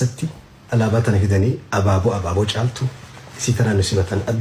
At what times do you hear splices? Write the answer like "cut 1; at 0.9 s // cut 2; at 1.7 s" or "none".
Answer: none

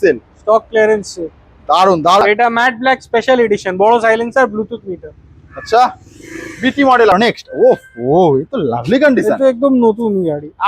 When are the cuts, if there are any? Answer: cut 1; at 2.2 s // cut 2; at 7.1 s

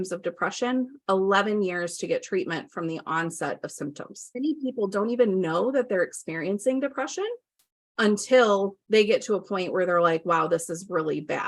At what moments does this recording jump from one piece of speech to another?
cut 1; at 4.2 s // cut 2; at 8.8 s

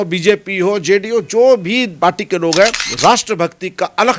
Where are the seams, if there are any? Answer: cut 1; at 1.9 s // cut 2; at 2.8 s

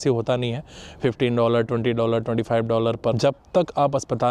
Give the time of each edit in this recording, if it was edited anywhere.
cut 1; at 3.1 s

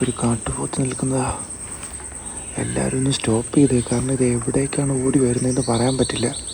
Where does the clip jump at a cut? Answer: none

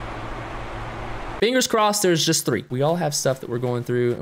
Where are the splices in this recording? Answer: cut 1; at 2.7 s

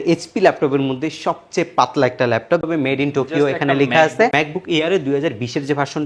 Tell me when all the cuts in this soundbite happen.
cut 1; at 2.7 s // cut 2; at 4.3 s

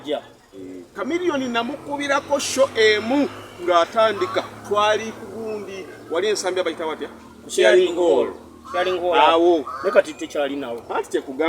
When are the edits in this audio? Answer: cut 1; at 0.9 s

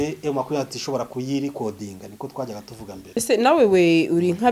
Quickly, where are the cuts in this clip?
cut 1; at 3.2 s

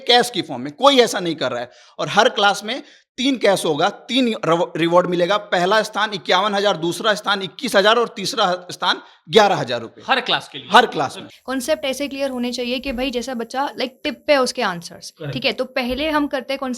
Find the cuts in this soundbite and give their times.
cut 1; at 11.2 s

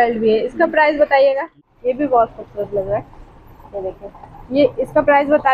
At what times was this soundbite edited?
cut 1; at 1.5 s

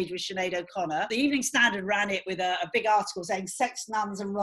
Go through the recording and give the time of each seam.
cut 1; at 1.1 s

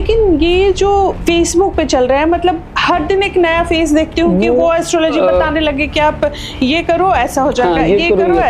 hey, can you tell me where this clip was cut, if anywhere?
cut 1; at 1.2 s

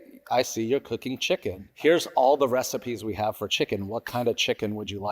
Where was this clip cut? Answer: cut 1; at 1.6 s

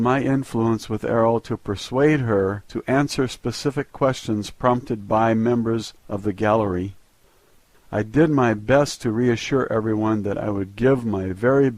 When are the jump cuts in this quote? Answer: cut 1; at 2.7 s

